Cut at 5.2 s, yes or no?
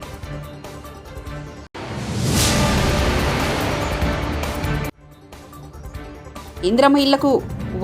no